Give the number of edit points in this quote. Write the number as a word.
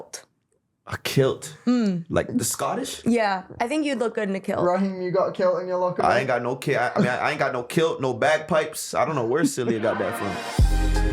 one